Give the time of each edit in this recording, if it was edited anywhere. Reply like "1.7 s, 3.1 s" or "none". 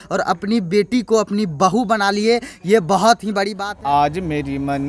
3.6 s